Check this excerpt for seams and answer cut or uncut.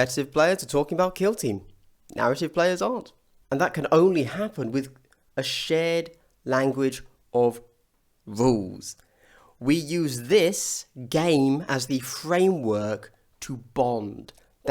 cut